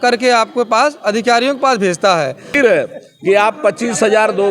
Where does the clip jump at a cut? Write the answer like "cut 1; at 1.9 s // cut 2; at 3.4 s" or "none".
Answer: cut 1; at 2.6 s